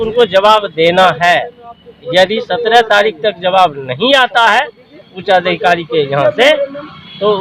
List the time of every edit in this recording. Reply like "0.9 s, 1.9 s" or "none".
none